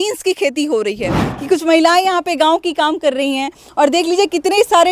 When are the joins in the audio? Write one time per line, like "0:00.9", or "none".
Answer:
0:01.2